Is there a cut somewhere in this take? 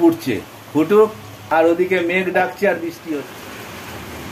yes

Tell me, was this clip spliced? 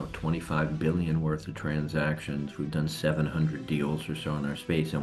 no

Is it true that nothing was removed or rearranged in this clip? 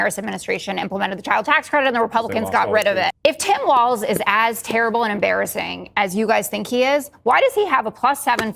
no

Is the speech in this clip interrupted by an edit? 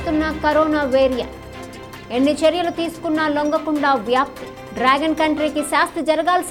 no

